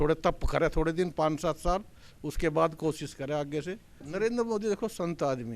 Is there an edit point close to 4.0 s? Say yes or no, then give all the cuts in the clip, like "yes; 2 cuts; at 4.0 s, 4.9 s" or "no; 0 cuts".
yes; 1 cut; at 4.0 s